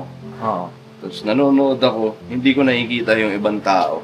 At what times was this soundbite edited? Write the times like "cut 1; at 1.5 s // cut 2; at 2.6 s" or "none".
cut 1; at 2.3 s